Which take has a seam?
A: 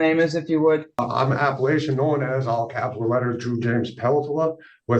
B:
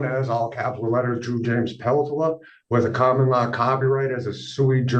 A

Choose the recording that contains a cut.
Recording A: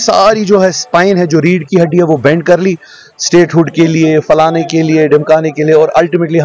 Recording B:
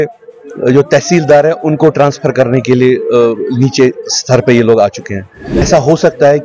B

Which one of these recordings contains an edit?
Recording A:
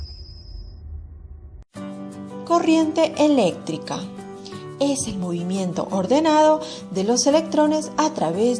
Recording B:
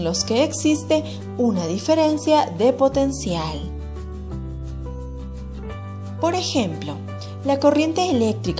A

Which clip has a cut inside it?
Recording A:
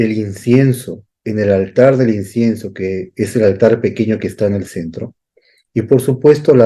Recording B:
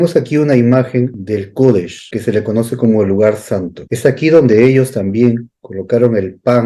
B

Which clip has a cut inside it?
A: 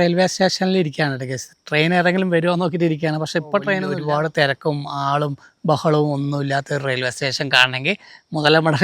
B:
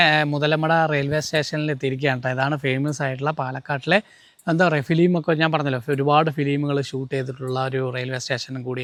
A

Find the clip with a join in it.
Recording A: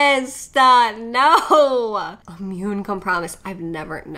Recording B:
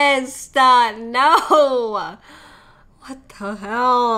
A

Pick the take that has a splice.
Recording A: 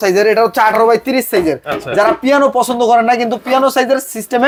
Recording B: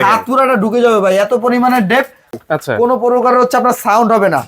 B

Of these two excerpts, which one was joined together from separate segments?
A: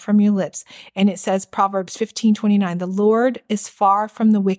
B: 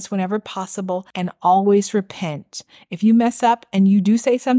B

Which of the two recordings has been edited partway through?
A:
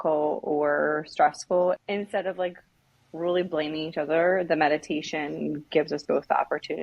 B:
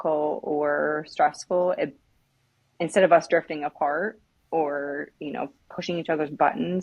A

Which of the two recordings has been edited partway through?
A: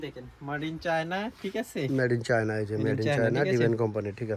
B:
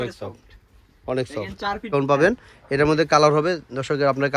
B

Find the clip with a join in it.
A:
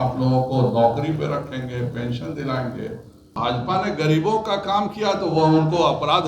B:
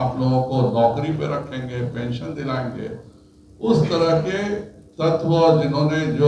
A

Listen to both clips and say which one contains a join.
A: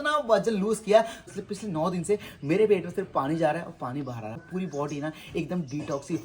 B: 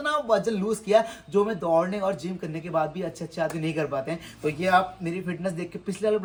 A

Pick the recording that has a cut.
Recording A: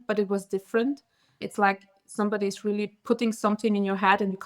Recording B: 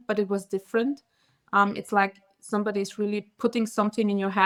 A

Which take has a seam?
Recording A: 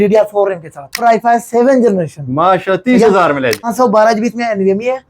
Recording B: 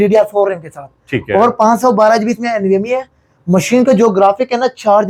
A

